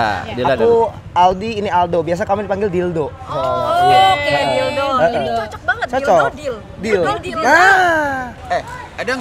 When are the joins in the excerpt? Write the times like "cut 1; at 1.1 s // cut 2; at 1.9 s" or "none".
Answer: cut 1; at 8.3 s